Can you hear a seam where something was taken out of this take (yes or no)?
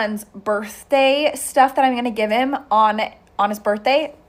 no